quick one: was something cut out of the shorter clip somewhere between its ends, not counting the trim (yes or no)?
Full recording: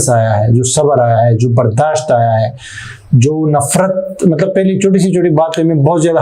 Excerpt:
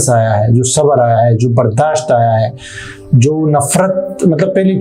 no